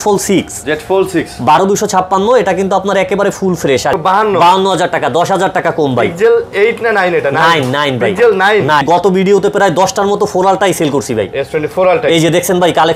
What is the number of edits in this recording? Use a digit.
2